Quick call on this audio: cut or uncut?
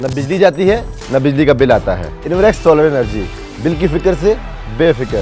cut